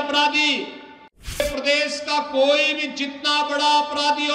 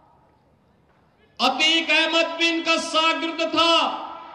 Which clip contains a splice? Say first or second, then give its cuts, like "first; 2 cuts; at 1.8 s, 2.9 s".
first; 1 cut; at 1.4 s